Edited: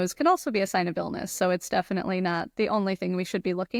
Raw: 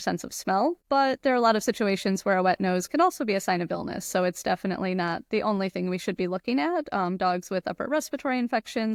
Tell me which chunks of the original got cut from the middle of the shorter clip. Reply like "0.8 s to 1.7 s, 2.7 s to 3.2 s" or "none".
none